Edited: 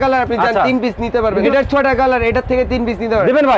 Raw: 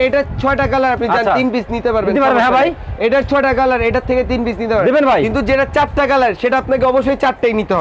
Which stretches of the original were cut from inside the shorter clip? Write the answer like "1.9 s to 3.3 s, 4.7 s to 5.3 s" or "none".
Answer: 2.2 s to 3.0 s